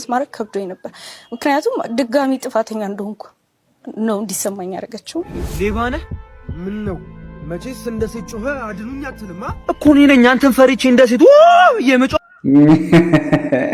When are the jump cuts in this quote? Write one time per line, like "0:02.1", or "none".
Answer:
0:05.2